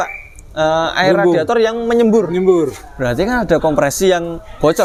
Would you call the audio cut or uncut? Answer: uncut